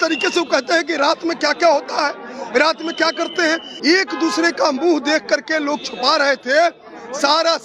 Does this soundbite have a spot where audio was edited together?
yes; 1 cut; at 3.7 s

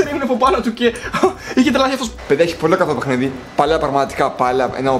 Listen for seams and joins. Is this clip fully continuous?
no; 1 cut; at 2.1 s

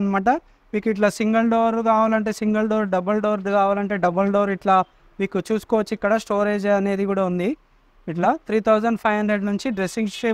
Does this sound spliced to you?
no; 0 cuts

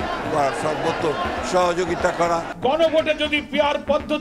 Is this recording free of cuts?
no; 1 cut; at 2.1 s

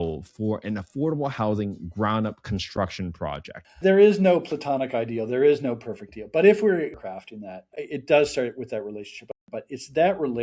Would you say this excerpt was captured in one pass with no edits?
no; 2 cuts; at 3.6 s, 9.2 s

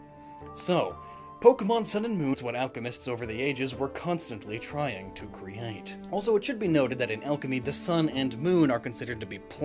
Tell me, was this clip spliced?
no; 0 cuts

